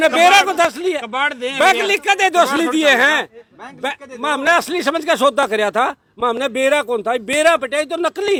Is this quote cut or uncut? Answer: uncut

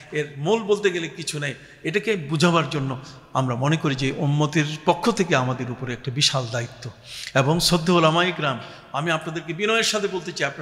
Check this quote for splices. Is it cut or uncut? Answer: uncut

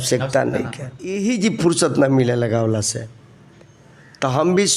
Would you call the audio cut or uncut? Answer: cut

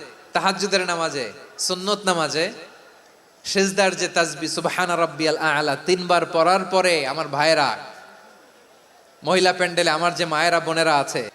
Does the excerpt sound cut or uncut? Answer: uncut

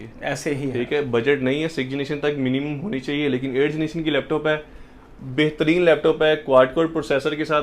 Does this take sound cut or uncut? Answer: uncut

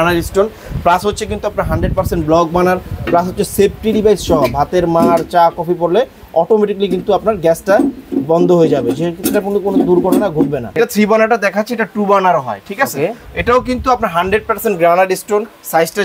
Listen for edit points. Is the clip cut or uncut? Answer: cut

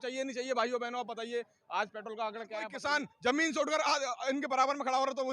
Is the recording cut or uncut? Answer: cut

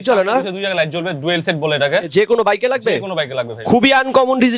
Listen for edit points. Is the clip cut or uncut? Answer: cut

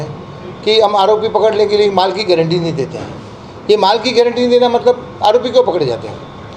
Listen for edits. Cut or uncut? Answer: uncut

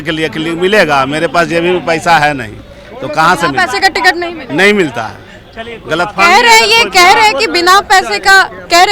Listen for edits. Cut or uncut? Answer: uncut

